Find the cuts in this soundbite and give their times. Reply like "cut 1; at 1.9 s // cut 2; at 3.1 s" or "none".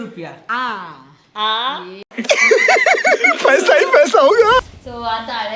cut 1; at 4.6 s